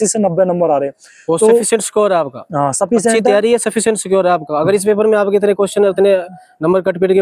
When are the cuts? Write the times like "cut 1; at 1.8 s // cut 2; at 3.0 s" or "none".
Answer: none